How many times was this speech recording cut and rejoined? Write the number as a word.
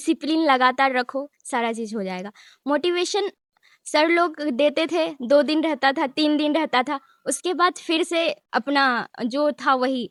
zero